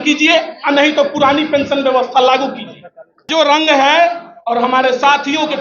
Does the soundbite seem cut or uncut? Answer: cut